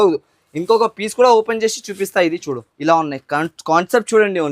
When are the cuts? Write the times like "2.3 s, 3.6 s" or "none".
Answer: 2.7 s